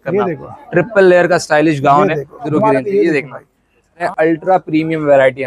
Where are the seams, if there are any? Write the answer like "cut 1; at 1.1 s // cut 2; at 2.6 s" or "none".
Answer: cut 1; at 2.5 s // cut 2; at 4.1 s

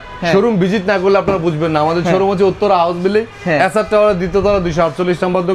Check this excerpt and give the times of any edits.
none

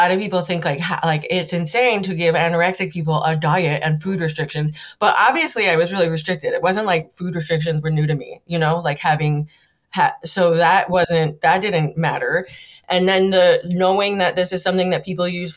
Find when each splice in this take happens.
none

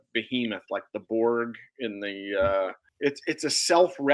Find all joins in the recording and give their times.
cut 1; at 2.8 s

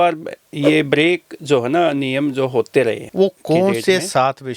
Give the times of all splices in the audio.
cut 1; at 3.0 s

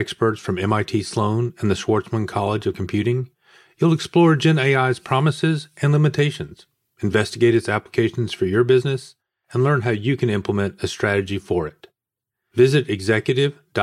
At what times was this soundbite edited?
none

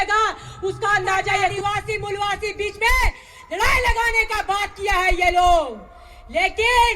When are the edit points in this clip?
cut 1; at 1.6 s

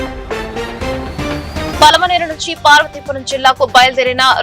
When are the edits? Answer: cut 1; at 1.7 s

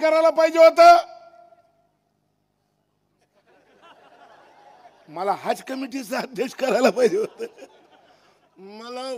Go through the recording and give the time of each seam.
none

